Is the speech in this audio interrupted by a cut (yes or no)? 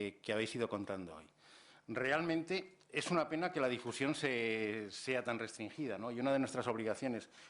yes